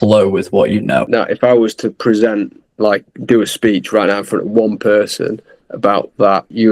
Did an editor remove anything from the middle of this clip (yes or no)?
no